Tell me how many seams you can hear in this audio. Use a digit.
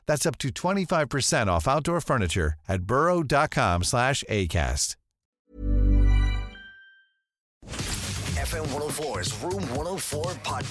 1